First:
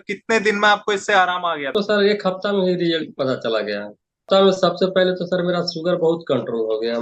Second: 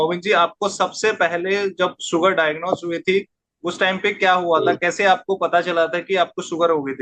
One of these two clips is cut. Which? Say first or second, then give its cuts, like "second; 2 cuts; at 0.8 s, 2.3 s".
first; 2 cuts; at 1.7 s, 4.3 s